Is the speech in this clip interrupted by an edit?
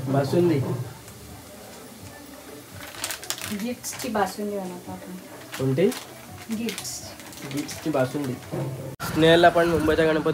yes; 1 cut; at 9.0 s

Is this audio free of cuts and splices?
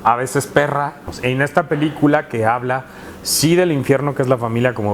no; 1 cut; at 1.1 s

